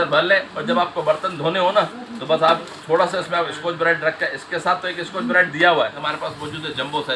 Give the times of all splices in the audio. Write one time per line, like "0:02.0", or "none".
0:06.1